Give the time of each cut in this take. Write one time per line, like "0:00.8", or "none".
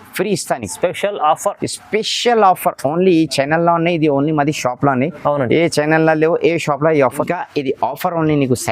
0:07.2